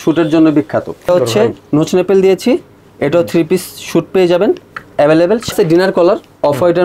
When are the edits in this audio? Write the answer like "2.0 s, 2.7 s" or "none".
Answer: 1.1 s, 5.5 s